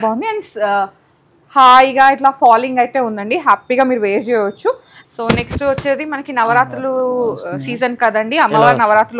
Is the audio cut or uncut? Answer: cut